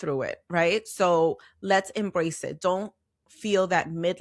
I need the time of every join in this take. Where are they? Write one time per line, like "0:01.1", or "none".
none